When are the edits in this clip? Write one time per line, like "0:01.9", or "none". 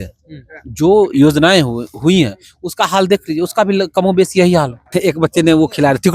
0:04.9